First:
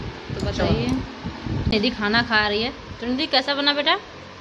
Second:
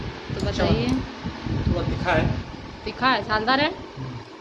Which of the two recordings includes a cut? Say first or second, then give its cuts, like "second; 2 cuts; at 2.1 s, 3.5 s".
first; 1 cut; at 1.7 s